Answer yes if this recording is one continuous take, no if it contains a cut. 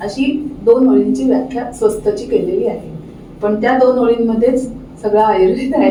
yes